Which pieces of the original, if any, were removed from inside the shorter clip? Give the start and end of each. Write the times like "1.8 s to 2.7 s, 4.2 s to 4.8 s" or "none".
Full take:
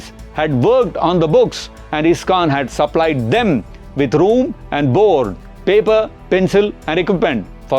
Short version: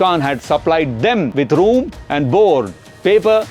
3.6 s to 3.9 s

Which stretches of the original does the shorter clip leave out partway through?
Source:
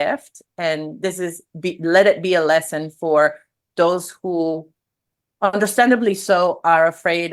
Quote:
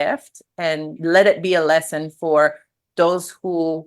1.0 s to 1.8 s

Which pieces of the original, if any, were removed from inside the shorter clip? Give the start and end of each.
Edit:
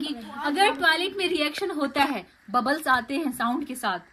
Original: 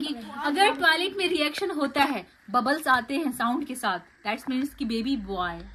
none

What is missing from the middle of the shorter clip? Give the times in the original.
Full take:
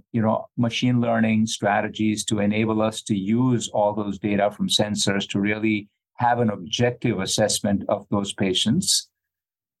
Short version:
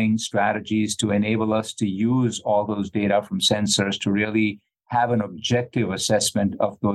none

